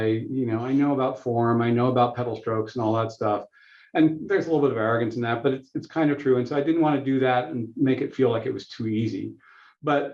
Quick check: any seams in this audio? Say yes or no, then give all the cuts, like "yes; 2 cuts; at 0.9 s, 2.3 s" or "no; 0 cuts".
no; 0 cuts